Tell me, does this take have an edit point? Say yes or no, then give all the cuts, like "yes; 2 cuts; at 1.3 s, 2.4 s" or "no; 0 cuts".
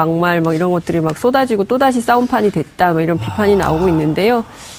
no; 0 cuts